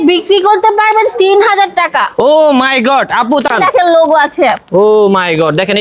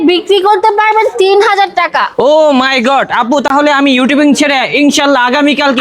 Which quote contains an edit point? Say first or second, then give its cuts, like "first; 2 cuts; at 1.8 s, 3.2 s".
first; 1 cut; at 3.5 s